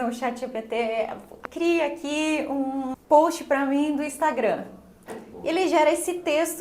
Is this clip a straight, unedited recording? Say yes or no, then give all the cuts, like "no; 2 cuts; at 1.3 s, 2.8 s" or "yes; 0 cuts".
no; 2 cuts; at 1.4 s, 2.9 s